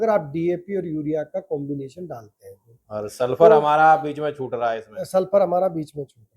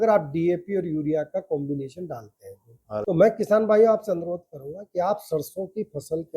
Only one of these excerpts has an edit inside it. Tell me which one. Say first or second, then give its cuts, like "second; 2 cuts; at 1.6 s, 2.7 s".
second; 1 cut; at 3.0 s